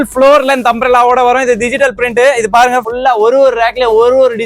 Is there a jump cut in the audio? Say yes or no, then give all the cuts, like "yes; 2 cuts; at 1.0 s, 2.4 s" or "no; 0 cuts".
yes; 1 cut; at 2.9 s